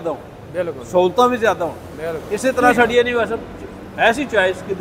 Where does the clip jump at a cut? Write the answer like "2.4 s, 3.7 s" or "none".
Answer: 2.7 s